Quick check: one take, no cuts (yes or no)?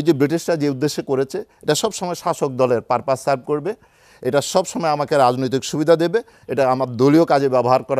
yes